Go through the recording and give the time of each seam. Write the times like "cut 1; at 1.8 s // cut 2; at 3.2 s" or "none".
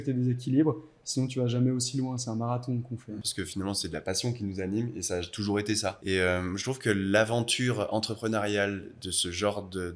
cut 1; at 3.3 s // cut 2; at 6.0 s